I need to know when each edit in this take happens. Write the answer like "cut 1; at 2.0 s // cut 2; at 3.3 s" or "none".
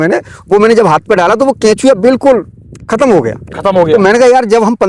none